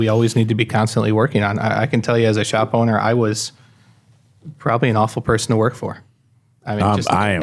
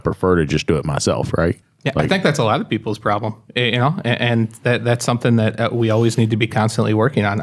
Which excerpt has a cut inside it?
second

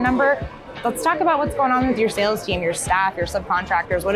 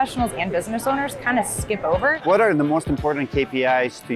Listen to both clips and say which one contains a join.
second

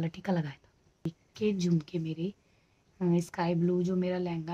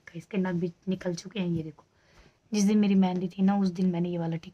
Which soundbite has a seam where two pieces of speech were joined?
first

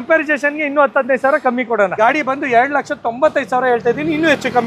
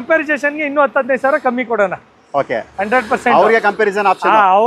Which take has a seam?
first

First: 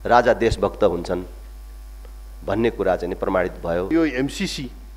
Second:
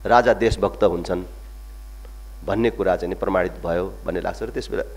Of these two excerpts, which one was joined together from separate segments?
first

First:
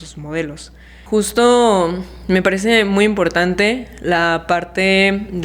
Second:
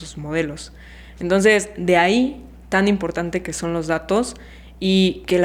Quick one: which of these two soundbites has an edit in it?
first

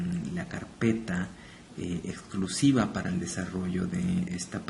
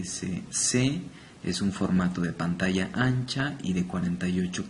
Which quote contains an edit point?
second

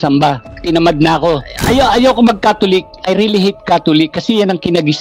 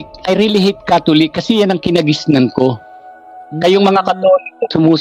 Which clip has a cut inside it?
first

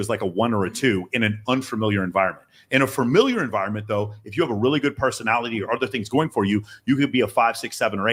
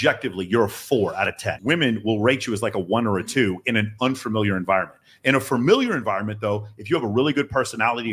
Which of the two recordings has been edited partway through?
second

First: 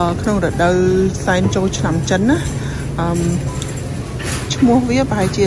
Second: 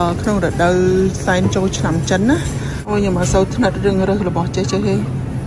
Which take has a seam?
second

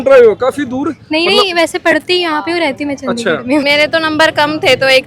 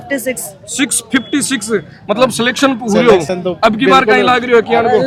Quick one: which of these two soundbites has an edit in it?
first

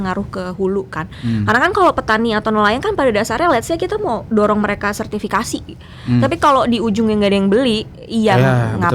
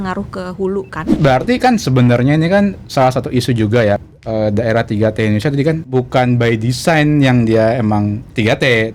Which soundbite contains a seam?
second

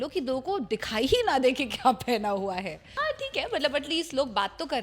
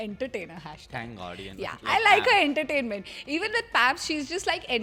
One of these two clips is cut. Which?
first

